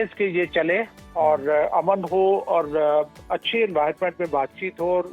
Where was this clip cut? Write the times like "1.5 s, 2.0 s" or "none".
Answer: none